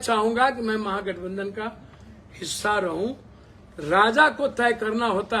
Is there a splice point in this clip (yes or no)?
no